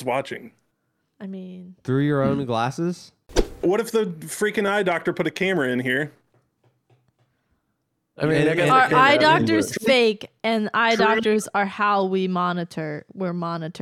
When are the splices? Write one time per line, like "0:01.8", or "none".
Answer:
0:03.6